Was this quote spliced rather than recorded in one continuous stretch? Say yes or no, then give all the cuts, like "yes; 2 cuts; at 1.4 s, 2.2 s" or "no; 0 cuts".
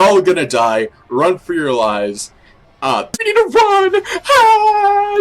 yes; 1 cut; at 3.2 s